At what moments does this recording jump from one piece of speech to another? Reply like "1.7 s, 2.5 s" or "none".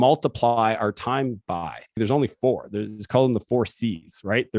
2.0 s

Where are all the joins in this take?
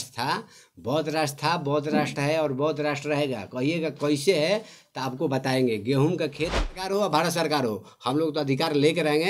6.6 s

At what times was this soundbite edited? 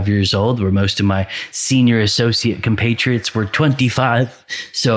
none

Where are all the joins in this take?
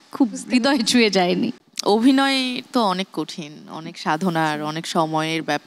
none

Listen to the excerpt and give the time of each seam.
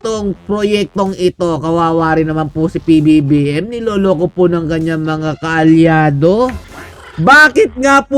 6.7 s

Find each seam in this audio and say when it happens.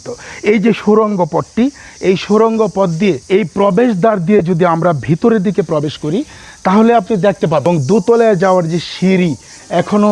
3.2 s, 7.6 s

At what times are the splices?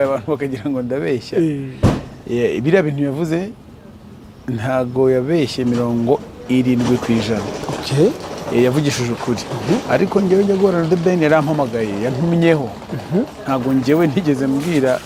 none

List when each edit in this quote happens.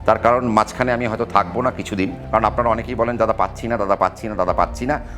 2.2 s

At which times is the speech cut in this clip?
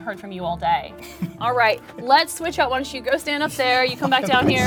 none

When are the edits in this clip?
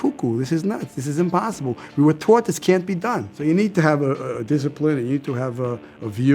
3.3 s

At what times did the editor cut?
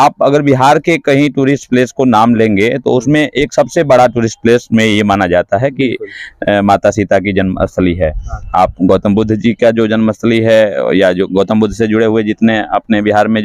none

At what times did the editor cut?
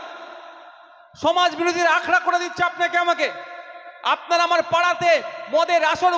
none

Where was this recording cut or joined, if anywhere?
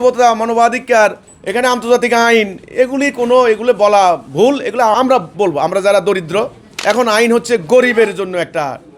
4.9 s, 6.6 s

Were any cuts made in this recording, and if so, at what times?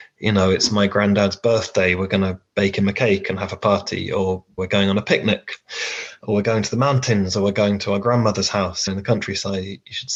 none

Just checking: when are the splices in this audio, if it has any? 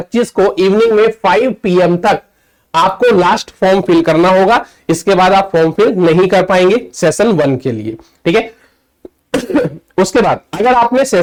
none

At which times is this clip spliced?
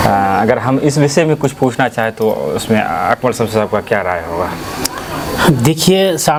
none

